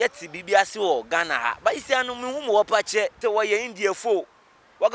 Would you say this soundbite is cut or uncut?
cut